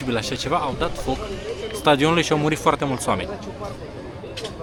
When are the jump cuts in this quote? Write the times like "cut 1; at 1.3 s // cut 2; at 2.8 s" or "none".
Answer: none